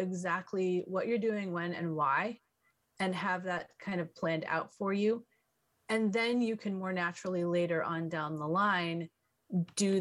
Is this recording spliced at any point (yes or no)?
no